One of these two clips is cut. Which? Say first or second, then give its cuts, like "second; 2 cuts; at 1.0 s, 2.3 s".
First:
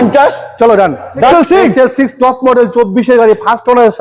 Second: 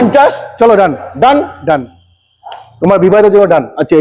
first; 1 cut; at 1.3 s